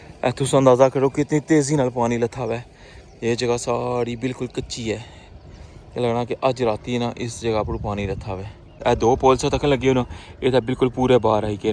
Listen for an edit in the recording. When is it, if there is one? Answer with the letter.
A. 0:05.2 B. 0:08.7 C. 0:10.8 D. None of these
B